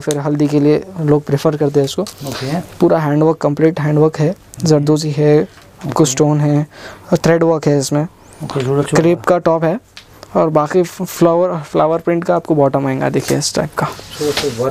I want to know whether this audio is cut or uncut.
uncut